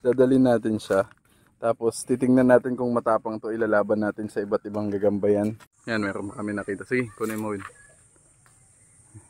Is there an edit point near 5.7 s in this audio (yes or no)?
yes